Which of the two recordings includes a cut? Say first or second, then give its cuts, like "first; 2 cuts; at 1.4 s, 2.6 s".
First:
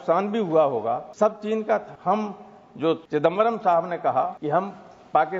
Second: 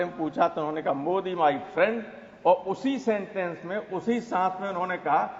first; 4 cuts; at 1.1 s, 1.9 s, 3.0 s, 4.4 s